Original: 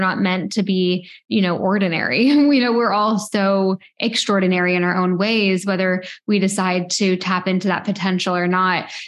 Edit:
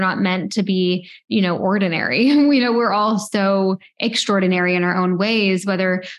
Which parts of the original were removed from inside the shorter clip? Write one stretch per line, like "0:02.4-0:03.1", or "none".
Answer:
none

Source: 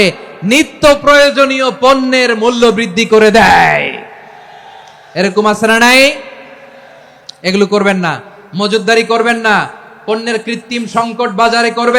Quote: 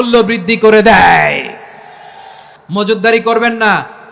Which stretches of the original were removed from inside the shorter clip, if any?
0:05.0-0:08.3

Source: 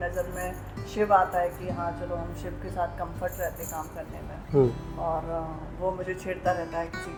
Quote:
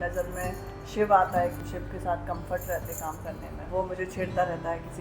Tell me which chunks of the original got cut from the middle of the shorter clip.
0:01.6-0:02.3
0:04.3-0:05.7

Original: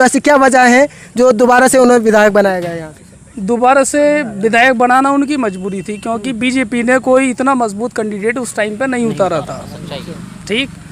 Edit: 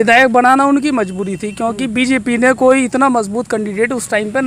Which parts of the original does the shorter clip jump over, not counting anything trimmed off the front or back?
none

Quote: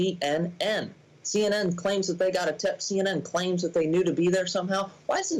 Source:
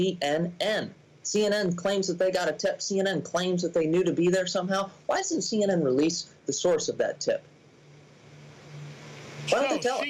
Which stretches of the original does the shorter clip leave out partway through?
none

